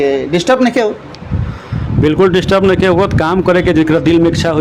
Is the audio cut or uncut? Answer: uncut